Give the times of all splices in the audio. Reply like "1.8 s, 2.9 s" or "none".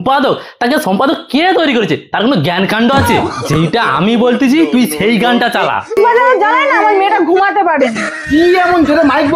6.0 s